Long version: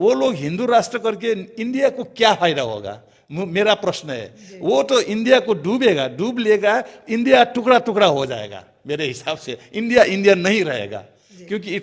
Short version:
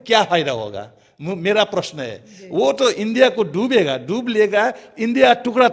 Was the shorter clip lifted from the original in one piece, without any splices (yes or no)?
yes